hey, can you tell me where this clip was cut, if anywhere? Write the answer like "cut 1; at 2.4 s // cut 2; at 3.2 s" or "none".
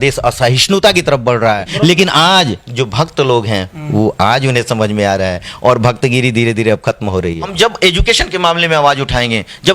cut 1; at 1.7 s // cut 2; at 7.5 s